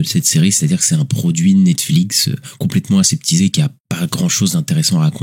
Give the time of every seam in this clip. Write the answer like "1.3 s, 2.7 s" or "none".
3.8 s